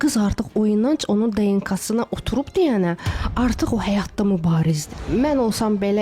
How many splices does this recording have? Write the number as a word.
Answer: one